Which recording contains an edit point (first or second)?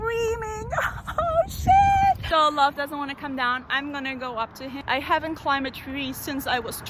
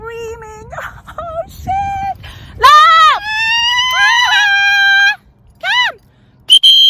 first